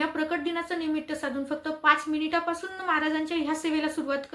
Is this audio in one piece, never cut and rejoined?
yes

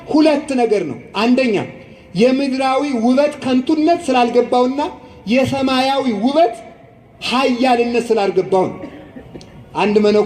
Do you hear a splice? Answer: no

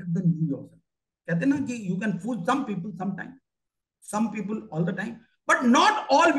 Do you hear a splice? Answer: no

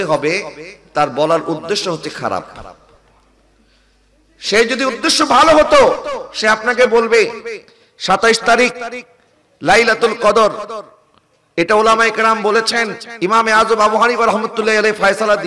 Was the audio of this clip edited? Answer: no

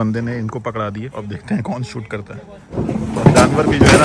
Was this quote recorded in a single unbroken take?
no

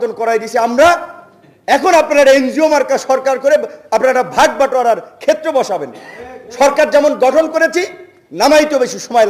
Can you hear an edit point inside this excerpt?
no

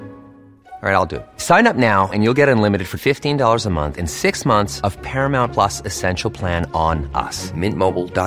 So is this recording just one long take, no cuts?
yes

